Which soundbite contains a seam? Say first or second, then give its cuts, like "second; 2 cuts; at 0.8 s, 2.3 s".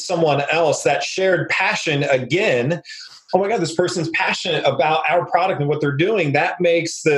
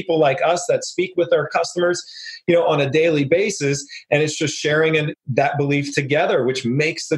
second; 1 cut; at 5.1 s